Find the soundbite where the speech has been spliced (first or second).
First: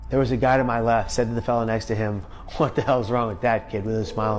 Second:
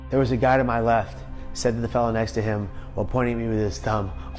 first